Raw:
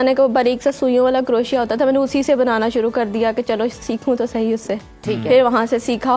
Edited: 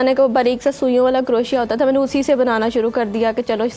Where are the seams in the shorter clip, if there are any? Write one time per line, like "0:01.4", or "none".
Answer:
none